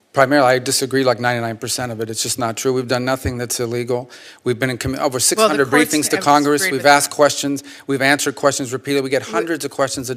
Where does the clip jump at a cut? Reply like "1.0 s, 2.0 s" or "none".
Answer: none